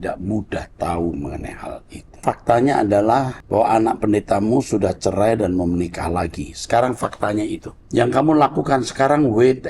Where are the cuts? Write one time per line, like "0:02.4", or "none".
0:02.2
0:03.4
0:07.7